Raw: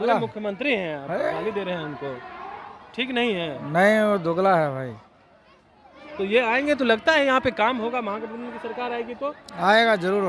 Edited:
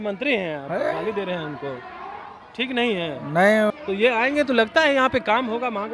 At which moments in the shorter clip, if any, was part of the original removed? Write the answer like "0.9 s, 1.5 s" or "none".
3.7 s